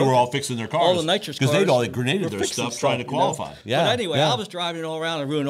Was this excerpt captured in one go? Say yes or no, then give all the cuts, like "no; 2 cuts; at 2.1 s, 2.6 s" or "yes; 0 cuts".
yes; 0 cuts